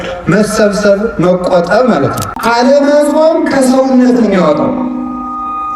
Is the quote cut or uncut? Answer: cut